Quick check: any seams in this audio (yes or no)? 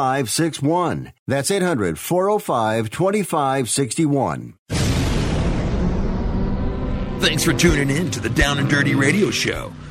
yes